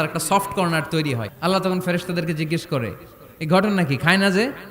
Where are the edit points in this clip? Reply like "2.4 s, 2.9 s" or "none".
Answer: 1.2 s